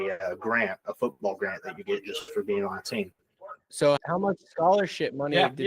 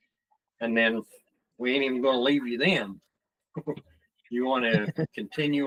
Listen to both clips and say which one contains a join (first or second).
first